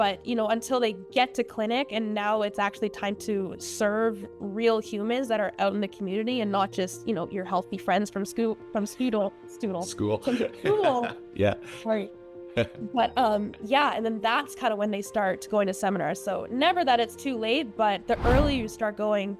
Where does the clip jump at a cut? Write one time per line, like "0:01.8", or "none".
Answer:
none